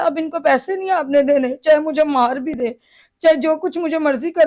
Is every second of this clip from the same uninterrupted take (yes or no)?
yes